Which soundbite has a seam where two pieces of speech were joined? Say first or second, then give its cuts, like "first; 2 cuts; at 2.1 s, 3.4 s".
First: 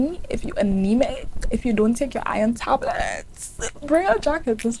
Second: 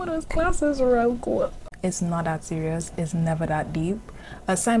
second; 1 cut; at 1.6 s